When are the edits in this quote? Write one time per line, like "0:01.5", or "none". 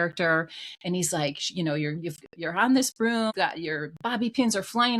0:03.3